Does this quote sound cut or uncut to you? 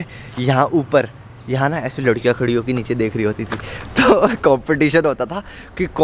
uncut